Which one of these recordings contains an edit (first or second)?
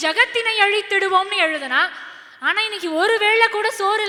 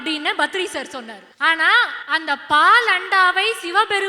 second